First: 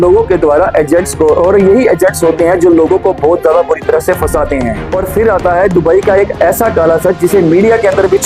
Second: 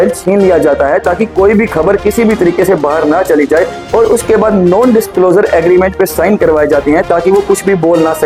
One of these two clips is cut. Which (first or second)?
first